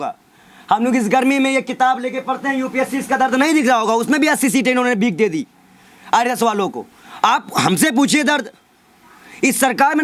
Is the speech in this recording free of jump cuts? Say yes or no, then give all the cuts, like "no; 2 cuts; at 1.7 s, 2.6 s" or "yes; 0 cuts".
yes; 0 cuts